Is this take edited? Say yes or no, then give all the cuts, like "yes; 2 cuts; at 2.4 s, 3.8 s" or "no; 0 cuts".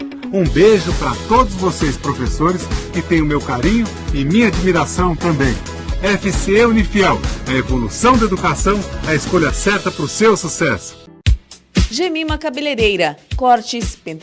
yes; 1 cut; at 11.0 s